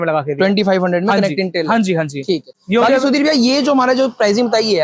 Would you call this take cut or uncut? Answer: uncut